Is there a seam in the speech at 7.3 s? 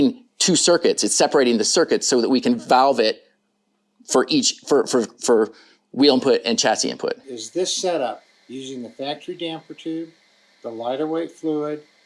yes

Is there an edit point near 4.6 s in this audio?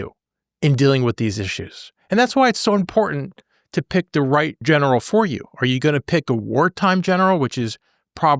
yes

